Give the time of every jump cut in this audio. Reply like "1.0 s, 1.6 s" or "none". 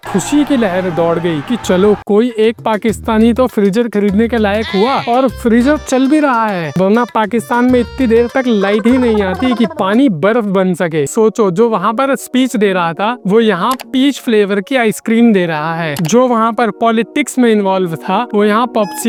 none